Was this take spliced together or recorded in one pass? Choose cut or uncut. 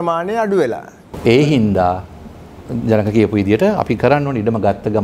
uncut